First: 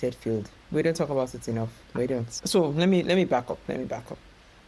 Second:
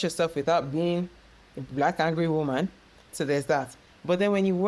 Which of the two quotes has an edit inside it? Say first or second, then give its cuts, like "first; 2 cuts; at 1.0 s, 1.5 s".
first; 1 cut; at 2.3 s